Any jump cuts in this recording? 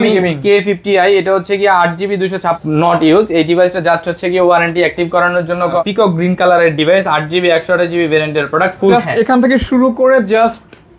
yes; 3 cuts; at 2.6 s, 5.8 s, 8.9 s

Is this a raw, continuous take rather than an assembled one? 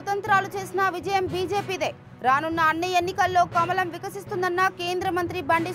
yes; 0 cuts

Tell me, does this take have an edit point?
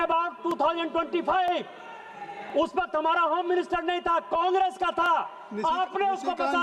no; 0 cuts

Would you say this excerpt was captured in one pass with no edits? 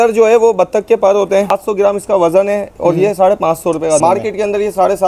no; 2 cuts; at 1.5 s, 4.0 s

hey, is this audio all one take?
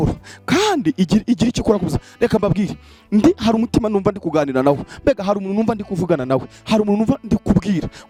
yes; 0 cuts

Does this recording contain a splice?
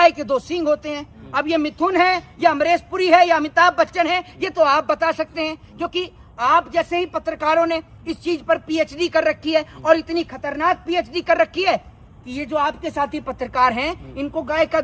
no; 0 cuts

